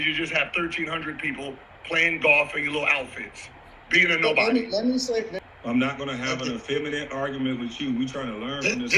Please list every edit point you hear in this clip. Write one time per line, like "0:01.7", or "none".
0:05.4